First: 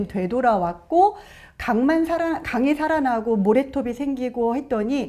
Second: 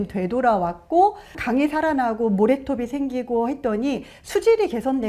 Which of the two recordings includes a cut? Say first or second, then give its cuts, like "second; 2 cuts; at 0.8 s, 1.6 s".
second; 1 cut; at 1.4 s